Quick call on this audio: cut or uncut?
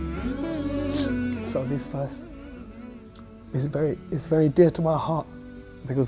cut